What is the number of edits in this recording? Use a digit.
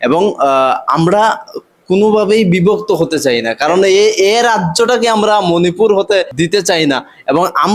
1